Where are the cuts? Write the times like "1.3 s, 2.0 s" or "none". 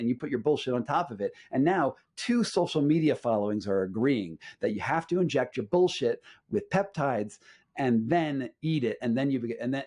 none